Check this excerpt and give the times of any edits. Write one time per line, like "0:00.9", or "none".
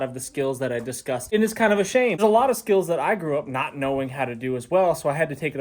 0:01.2
0:02.2